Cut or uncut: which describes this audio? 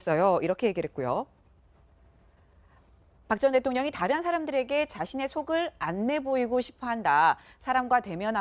cut